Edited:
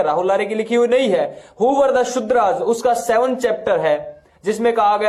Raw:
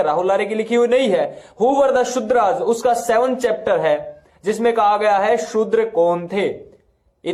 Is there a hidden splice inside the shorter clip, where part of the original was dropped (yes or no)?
no